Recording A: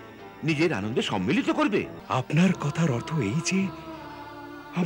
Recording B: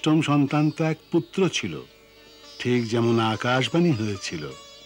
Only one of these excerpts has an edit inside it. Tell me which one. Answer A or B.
A